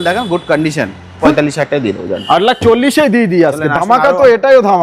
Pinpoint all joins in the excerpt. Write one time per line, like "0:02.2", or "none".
0:01.3